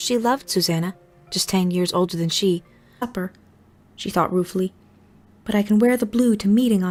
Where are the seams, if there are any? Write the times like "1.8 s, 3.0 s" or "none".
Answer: none